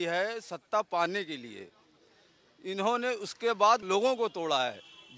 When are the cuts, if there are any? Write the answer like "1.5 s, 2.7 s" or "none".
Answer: 3.8 s